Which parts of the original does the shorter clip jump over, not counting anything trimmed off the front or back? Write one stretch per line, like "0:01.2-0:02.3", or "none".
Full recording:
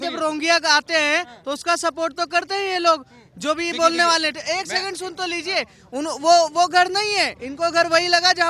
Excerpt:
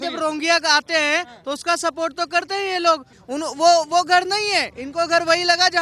0:03.1-0:05.8